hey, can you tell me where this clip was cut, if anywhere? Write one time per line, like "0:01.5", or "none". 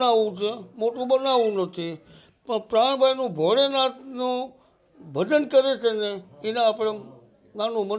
none